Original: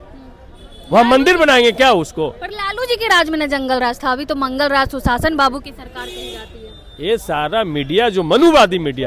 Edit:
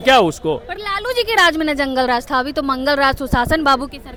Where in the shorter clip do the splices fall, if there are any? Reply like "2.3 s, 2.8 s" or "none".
none

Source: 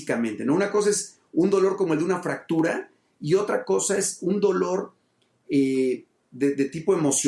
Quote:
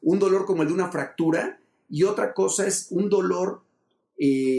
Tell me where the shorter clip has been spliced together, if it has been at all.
none

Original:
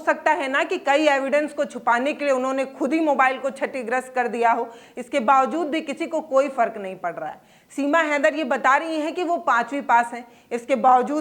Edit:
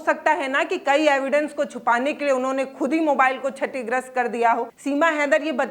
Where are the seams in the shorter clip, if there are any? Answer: 4.7 s

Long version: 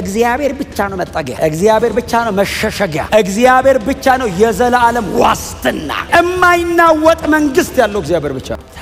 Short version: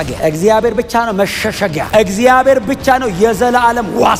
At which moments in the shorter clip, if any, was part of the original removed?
none

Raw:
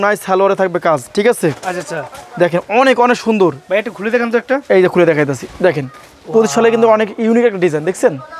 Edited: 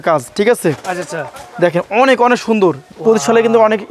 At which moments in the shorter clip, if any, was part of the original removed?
2.8 s

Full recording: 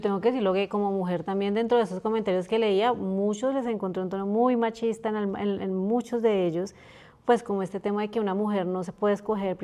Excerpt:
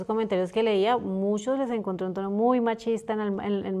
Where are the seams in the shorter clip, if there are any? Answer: none

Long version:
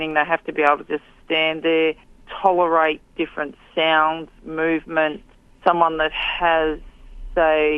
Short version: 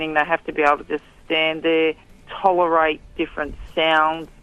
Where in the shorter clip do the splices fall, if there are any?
none

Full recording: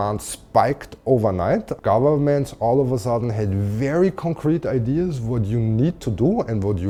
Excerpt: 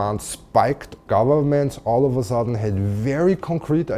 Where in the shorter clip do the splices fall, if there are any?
1.0 s

